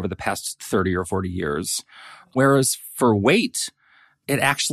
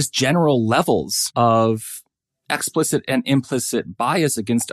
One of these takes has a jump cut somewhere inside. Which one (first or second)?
second